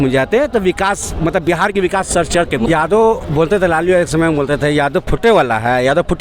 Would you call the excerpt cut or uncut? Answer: cut